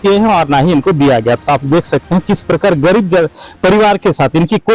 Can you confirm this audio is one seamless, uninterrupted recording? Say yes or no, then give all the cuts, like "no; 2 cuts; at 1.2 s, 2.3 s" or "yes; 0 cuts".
yes; 0 cuts